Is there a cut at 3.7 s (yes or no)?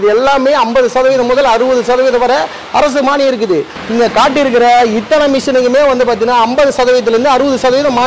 yes